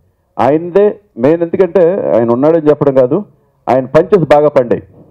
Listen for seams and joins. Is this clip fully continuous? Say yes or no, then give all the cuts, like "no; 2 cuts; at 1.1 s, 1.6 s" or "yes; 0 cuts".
yes; 0 cuts